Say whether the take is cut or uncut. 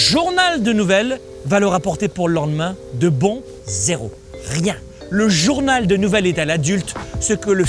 cut